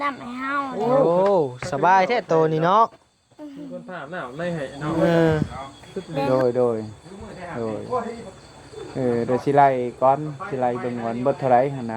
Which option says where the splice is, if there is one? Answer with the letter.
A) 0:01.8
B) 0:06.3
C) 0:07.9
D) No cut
B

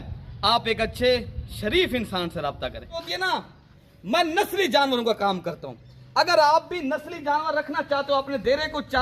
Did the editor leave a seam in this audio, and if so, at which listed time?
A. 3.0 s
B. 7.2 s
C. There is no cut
A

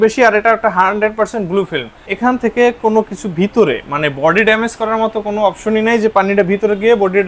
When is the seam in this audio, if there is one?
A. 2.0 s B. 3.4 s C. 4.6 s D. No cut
A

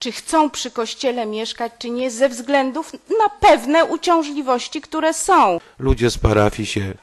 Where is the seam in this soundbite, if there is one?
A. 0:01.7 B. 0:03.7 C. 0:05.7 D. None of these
C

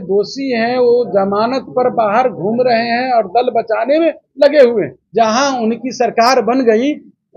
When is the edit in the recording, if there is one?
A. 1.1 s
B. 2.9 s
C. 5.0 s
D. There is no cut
C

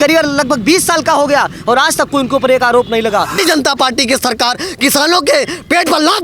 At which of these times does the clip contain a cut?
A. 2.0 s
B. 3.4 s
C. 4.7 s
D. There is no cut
B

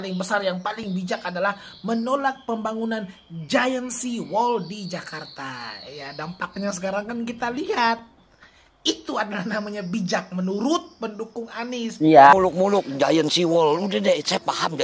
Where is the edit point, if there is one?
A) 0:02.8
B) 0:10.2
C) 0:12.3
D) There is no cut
C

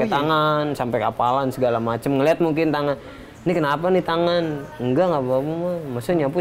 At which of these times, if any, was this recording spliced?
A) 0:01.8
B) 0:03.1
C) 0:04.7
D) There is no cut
C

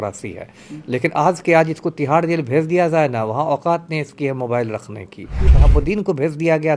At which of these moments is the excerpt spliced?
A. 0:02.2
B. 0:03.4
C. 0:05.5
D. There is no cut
C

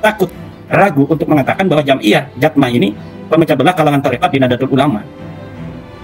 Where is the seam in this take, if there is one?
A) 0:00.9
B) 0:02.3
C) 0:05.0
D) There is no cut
D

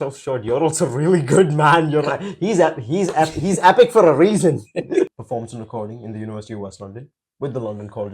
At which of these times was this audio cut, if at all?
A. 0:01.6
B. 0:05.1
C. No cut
B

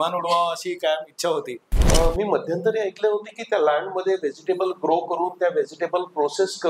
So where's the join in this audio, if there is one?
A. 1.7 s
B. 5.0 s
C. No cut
A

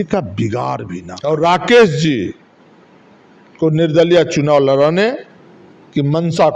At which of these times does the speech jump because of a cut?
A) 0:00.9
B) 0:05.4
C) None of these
A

